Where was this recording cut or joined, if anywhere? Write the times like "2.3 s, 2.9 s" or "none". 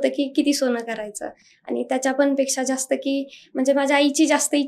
none